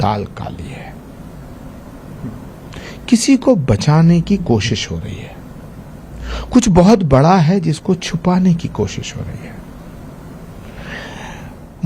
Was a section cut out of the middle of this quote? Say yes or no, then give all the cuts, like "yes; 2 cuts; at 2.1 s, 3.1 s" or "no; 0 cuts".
no; 0 cuts